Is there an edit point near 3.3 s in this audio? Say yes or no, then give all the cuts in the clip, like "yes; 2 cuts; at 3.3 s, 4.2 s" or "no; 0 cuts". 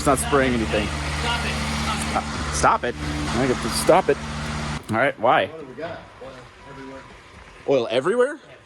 yes; 2 cuts; at 3.3 s, 4.7 s